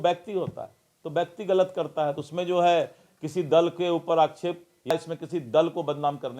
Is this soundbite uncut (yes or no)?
no